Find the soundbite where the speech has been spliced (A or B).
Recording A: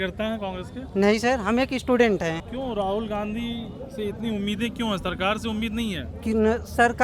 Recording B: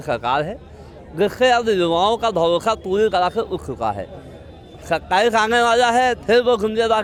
A